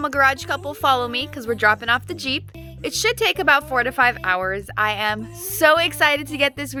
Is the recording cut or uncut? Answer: uncut